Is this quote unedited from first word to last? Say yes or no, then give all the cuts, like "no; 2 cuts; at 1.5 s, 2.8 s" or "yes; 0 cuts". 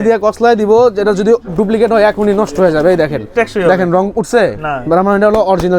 no; 1 cut; at 3.3 s